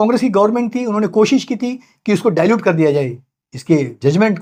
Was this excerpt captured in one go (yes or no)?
yes